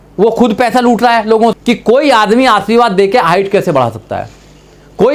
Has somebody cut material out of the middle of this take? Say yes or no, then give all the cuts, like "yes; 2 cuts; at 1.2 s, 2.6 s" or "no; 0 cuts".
yes; 1 cut; at 1.5 s